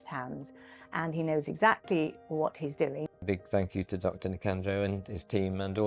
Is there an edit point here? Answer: yes; 1 cut; at 3.2 s

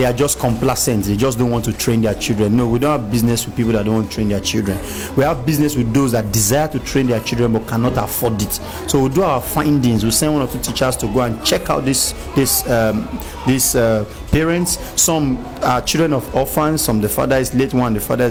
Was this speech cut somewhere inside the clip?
no; 0 cuts

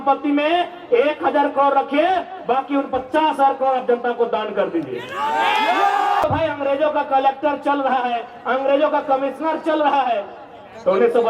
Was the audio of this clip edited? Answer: yes; 1 cut; at 6.2 s

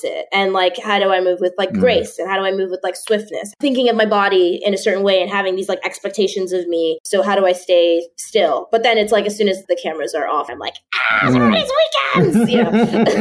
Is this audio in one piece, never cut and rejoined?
no; 4 cuts; at 3.5 s, 7.0 s, 9.6 s, 10.5 s

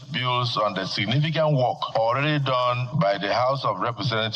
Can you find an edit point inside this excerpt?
yes; 2 cuts; at 1.8 s, 2.9 s

